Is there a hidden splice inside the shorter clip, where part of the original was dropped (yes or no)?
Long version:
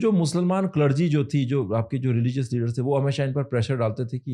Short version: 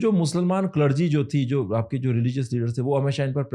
no